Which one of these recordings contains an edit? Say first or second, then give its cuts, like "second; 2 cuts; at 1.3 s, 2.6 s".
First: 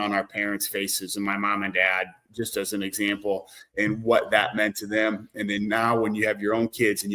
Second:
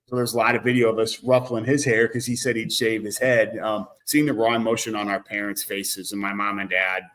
second; 1 cut; at 3.9 s